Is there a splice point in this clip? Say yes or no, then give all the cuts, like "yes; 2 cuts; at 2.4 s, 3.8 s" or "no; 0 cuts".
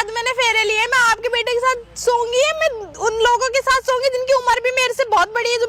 no; 0 cuts